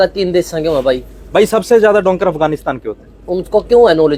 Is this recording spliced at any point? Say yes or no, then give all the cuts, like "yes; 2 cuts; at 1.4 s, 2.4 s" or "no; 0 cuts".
no; 0 cuts